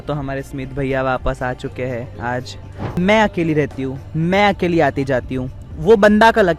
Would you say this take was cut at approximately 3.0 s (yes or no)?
yes